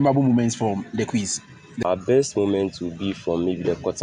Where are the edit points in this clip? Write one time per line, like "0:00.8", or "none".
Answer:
0:01.8